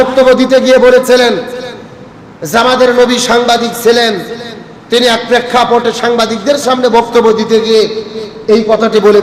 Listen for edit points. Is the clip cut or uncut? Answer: uncut